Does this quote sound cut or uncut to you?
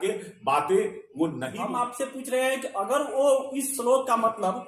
cut